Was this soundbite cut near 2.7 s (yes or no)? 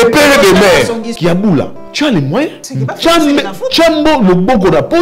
yes